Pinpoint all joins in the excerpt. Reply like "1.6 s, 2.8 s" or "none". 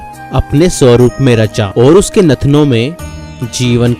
1.6 s